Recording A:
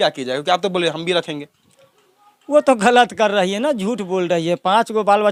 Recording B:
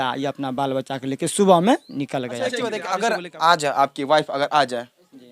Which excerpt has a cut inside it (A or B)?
B